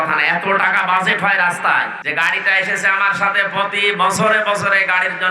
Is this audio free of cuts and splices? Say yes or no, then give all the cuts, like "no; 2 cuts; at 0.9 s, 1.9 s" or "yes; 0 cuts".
no; 1 cut; at 2.0 s